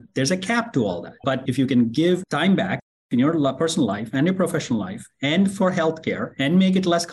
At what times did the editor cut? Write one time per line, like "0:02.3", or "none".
0:01.2

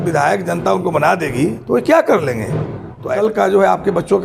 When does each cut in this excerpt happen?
0:03.1

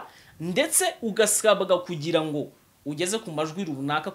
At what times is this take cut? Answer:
none

